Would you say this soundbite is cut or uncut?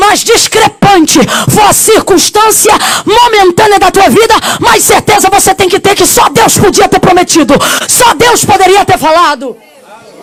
uncut